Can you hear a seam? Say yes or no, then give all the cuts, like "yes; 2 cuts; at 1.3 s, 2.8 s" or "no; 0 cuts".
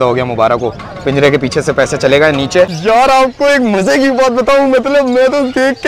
yes; 1 cut; at 2.7 s